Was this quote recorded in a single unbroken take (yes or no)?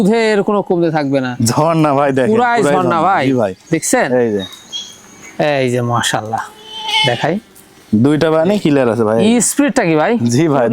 yes